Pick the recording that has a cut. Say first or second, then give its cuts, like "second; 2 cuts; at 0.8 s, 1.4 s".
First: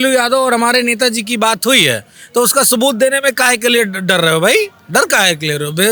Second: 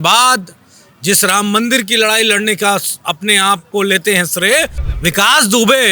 second; 1 cut; at 4.8 s